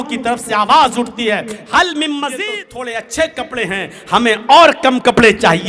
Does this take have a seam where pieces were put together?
yes; 1 cut; at 2.4 s

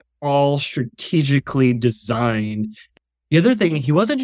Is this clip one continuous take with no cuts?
no; 1 cut; at 2.9 s

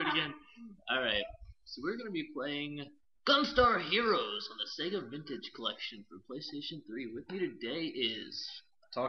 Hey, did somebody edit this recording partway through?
yes; 1 cut; at 1.4 s

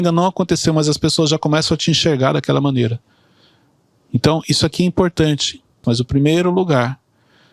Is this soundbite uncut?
no; 1 cut; at 5.8 s

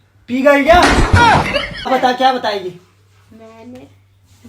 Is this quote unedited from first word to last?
no; 1 cut; at 1.9 s

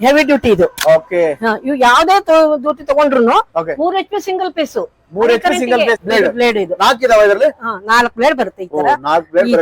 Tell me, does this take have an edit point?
yes; 1 cut; at 6.0 s

